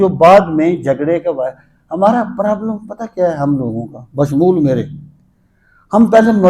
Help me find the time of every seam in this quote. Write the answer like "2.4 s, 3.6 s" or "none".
none